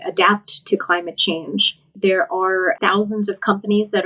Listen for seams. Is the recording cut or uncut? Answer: cut